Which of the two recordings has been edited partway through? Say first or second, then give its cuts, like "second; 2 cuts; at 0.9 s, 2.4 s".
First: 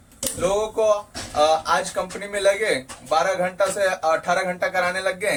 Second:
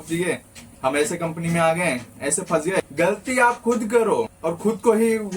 second; 2 cuts; at 2.9 s, 4.4 s